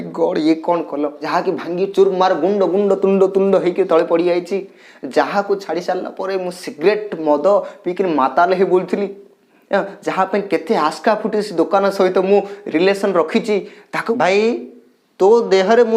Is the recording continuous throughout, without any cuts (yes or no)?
no